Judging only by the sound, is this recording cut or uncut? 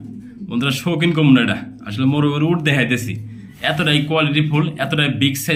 uncut